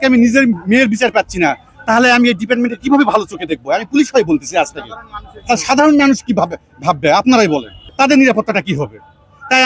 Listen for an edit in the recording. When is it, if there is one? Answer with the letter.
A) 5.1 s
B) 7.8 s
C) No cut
B